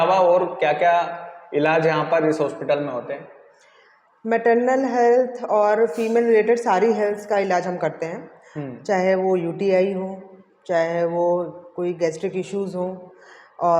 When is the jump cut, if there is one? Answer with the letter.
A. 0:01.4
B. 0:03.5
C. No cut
C